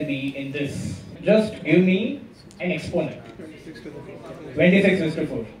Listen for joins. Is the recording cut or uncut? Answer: cut